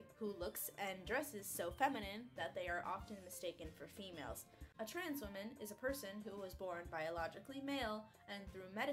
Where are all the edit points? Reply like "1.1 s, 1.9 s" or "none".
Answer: none